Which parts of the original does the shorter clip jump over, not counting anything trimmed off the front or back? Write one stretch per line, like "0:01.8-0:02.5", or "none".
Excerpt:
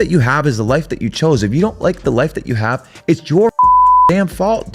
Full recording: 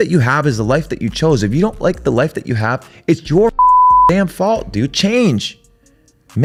none